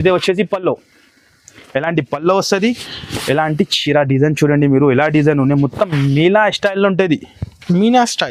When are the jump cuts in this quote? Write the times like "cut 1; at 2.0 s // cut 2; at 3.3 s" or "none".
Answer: none